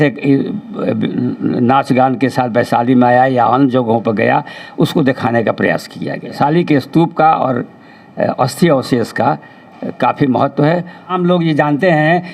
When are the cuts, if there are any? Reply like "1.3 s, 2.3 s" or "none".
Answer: 6.3 s, 11.1 s